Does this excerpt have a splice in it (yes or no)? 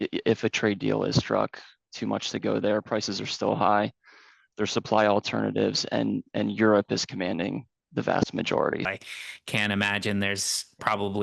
yes